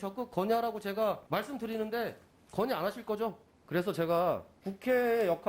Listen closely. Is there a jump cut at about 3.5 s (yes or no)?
yes